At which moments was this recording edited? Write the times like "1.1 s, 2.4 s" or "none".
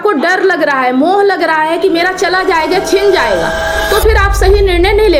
none